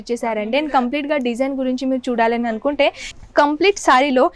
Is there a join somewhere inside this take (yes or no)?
yes